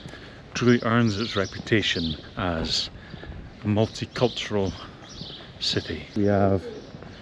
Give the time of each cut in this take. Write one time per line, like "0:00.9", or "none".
0:06.0